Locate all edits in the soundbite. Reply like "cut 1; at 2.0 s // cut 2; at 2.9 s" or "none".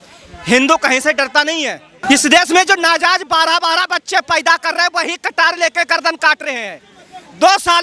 cut 1; at 2.0 s